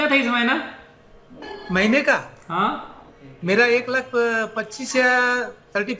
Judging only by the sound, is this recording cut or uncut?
uncut